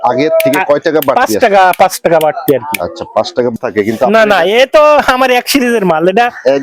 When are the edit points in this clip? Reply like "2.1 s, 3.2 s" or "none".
3.6 s

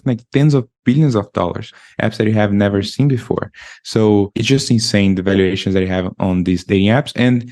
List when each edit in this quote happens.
1.7 s, 4.4 s

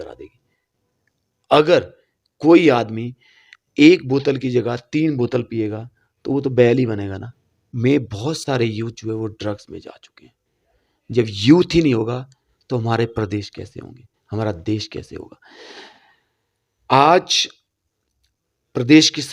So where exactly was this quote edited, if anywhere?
7.7 s

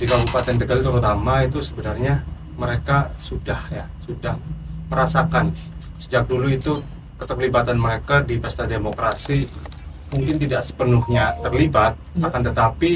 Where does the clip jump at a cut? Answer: none

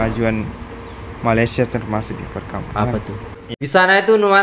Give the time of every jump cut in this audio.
3.3 s

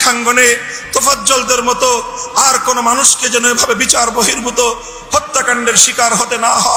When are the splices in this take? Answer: none

